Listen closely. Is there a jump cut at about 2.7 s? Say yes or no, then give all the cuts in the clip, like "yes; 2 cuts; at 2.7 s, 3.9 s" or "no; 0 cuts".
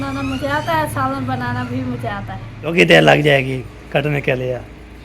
yes; 1 cut; at 2.7 s